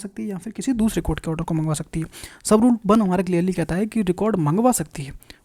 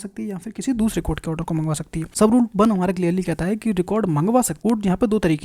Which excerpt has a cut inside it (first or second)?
second